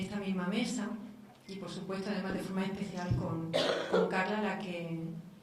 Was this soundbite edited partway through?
no; 0 cuts

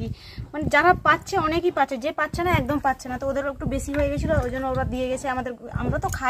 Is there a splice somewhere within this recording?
no; 0 cuts

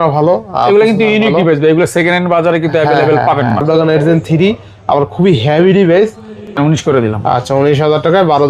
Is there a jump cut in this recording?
yes; 2 cuts; at 3.6 s, 6.3 s

